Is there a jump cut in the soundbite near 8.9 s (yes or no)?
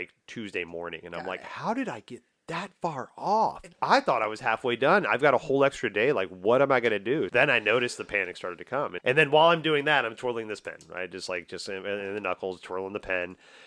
yes